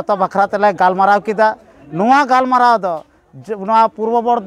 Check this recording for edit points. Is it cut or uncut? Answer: uncut